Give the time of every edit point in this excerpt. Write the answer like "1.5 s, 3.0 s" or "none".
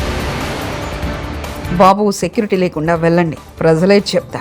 1.6 s